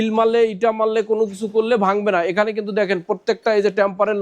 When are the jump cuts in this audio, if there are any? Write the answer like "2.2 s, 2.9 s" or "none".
none